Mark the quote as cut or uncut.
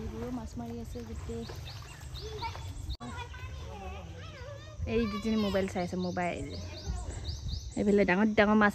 cut